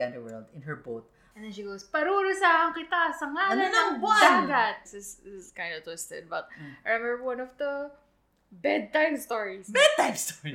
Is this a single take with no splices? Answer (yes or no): no